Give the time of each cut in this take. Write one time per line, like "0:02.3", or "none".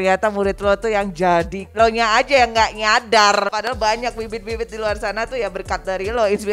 0:01.6
0:03.5